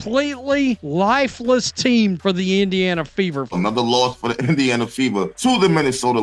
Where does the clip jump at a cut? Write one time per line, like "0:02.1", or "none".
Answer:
0:00.8
0:02.2
0:03.5
0:05.3

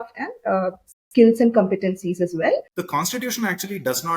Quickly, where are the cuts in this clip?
0:02.8

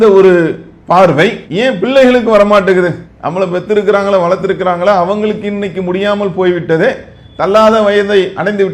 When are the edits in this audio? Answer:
none

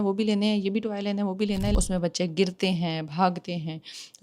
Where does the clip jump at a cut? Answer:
0:01.7

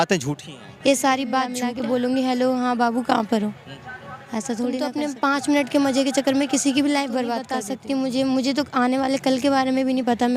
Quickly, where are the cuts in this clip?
0:01.6
0:04.9
0:07.5

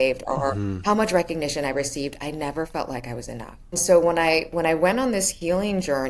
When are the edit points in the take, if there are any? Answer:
0:03.8

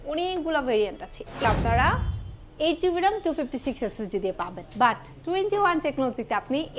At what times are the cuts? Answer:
0:01.4

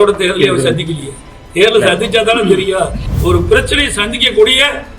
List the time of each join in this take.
0:03.1

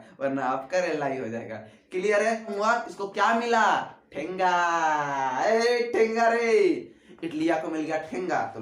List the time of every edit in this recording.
0:02.9

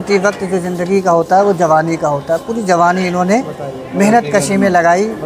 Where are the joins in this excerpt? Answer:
none

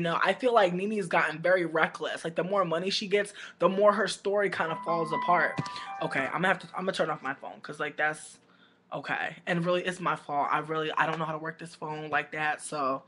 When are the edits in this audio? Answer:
0:07.2

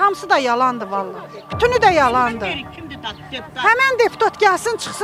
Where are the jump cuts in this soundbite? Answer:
none

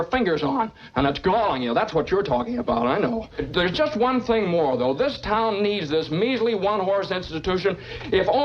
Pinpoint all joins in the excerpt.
0:03.4

